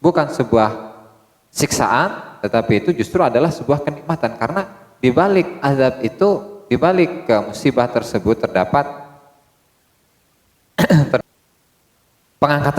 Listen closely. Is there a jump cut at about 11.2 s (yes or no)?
yes